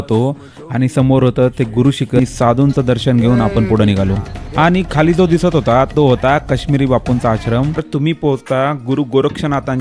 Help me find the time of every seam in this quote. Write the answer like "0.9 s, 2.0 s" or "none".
2.2 s, 7.9 s

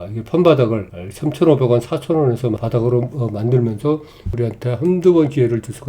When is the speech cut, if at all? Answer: 2.6 s, 4.3 s

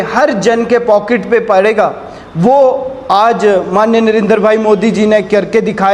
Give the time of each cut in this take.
none

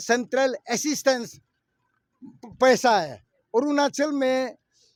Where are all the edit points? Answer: none

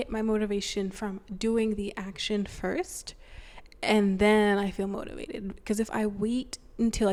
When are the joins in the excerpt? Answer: none

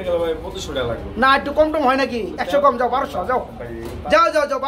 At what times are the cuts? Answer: none

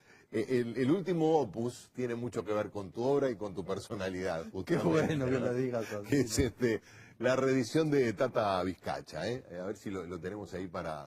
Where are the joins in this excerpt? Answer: 2.4 s

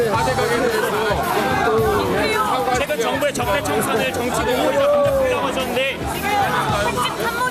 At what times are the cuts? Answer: none

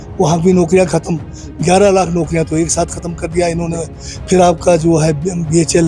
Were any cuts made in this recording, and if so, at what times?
none

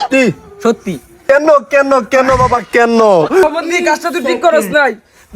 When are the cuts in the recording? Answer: 1.1 s, 3.4 s

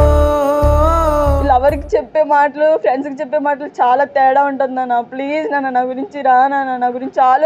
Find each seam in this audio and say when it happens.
1.4 s

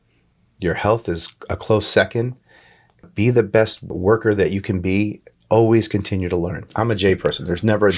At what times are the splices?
3.1 s, 3.9 s, 6.7 s

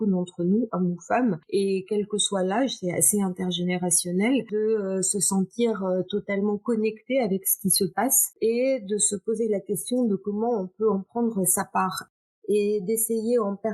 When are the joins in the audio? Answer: 1.4 s, 4.5 s, 8.4 s, 12.0 s

